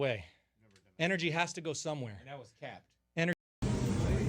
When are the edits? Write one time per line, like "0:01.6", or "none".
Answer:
0:03.3